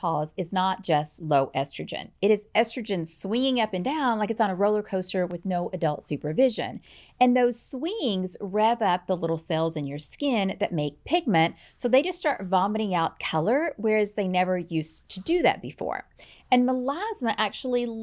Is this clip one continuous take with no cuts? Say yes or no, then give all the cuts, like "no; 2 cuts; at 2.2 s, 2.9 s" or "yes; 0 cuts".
yes; 0 cuts